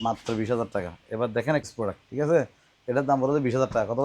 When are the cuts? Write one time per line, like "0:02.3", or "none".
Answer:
0:01.7

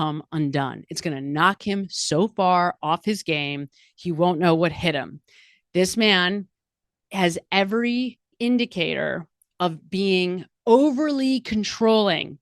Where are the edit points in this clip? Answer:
0:08.3

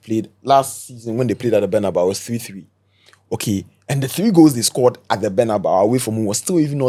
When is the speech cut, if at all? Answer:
none

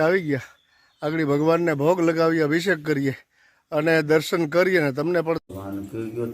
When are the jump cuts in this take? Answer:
0:05.4

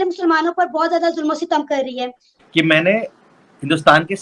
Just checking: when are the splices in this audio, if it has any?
0:02.3

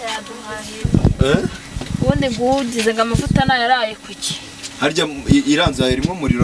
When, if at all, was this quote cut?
none

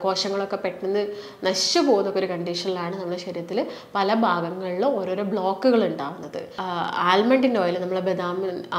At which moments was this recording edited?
0:06.6

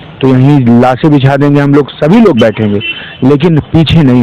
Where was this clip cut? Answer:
none

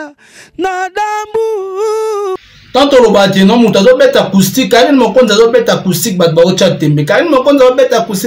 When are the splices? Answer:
0:02.4

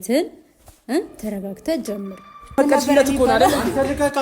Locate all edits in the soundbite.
0:02.6

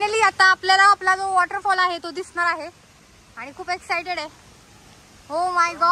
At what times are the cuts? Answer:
none

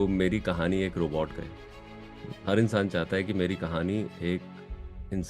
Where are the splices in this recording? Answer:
none

